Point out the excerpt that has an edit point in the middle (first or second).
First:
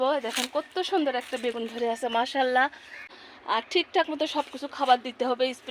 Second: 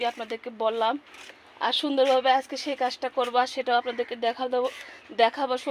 first